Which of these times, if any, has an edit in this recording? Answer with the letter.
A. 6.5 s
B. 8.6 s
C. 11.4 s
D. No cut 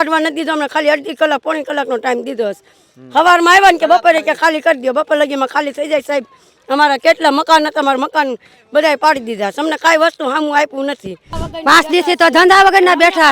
C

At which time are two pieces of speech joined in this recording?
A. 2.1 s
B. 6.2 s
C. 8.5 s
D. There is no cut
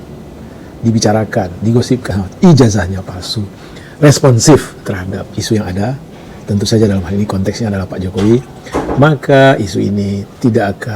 A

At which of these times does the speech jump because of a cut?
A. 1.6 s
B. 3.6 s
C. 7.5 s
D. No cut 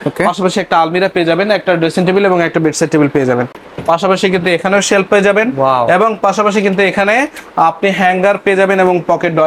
B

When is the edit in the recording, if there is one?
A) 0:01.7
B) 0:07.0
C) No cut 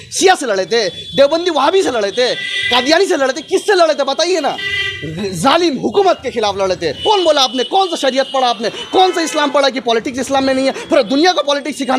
B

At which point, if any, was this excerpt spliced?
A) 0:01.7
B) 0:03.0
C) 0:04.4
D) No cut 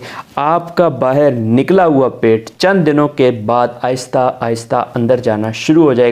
D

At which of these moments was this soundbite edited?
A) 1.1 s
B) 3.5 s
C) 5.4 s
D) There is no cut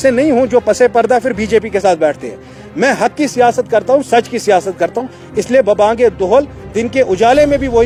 D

